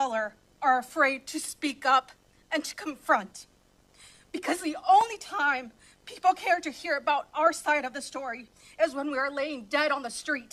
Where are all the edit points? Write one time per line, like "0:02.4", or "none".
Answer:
none